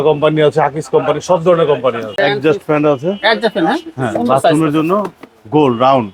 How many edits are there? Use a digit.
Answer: 1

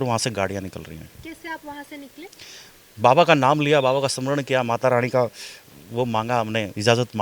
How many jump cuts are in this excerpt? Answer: 1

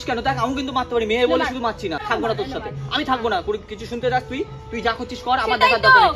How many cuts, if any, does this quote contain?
1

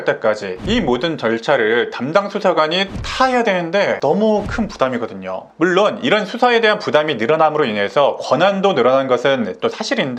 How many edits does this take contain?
0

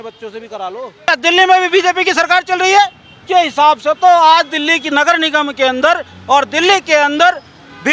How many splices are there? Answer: 2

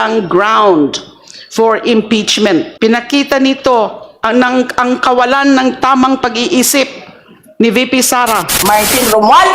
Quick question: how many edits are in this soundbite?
2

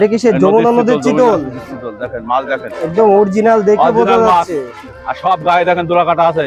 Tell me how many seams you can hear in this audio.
0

